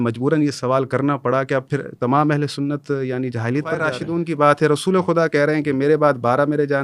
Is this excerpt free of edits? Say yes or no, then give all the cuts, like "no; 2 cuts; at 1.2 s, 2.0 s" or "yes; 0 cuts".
no; 1 cut; at 4.0 s